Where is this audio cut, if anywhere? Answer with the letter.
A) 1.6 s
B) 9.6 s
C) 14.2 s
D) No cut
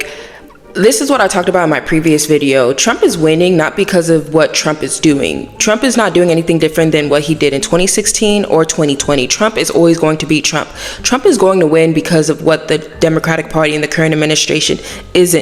D